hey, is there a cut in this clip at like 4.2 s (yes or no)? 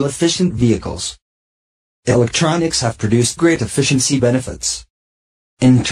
no